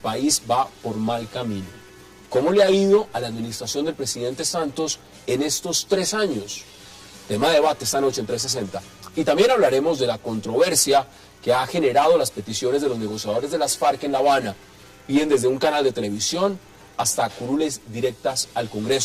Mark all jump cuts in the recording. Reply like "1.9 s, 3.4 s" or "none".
13.2 s